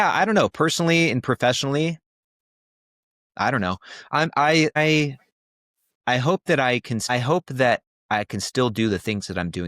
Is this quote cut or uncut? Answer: cut